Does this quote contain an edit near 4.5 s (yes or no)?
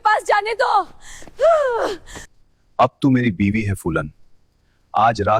no